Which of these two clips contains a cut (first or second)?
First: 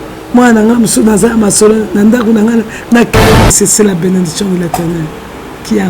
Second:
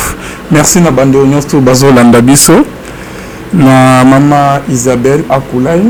first